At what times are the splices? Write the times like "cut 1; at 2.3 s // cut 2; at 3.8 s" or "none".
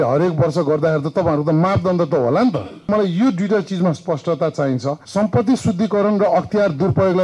cut 1; at 2.9 s // cut 2; at 5.0 s